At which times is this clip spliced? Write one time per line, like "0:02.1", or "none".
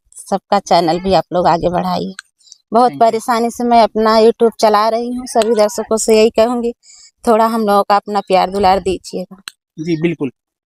none